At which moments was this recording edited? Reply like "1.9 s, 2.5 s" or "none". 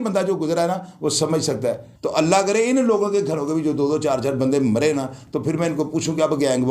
1.9 s